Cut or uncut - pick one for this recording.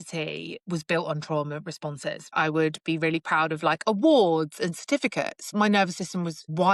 cut